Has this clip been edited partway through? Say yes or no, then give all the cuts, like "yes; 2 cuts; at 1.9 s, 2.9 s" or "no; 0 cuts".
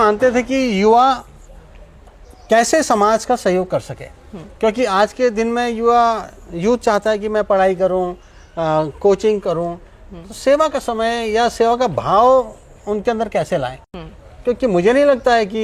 no; 0 cuts